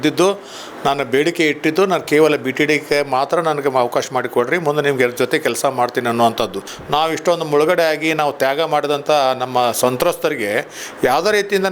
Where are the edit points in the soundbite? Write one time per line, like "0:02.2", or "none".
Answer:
0:06.7